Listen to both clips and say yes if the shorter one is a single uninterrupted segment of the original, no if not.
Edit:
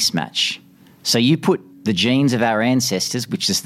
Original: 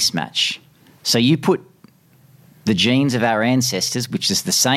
no